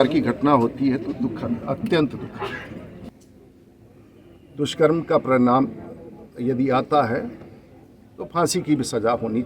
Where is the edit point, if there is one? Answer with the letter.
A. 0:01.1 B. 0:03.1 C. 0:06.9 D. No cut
B